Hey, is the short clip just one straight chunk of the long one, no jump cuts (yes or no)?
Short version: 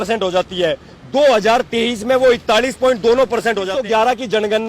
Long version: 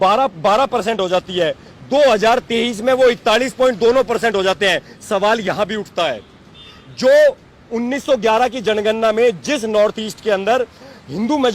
no